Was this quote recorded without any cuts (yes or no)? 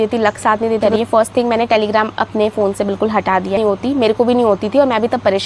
no